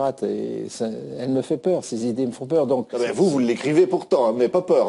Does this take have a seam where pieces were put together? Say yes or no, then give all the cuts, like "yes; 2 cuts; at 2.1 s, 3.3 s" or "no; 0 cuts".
yes; 1 cut; at 3.6 s